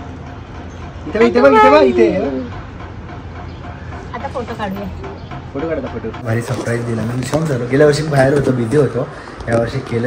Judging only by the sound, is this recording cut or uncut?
cut